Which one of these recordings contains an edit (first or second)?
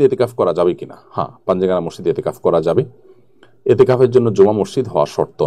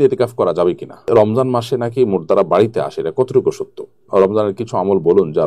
second